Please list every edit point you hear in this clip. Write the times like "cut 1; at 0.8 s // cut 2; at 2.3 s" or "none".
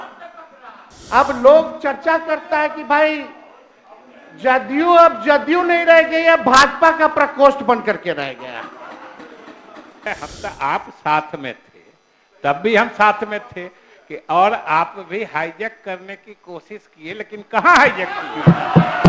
cut 1; at 10.1 s